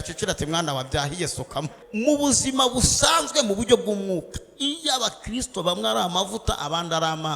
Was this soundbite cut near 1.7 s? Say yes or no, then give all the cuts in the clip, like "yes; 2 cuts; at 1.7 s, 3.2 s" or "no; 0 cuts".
yes; 1 cut; at 1.7 s